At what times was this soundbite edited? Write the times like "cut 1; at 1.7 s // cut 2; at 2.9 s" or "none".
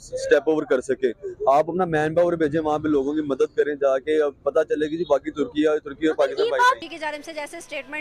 cut 1; at 6.8 s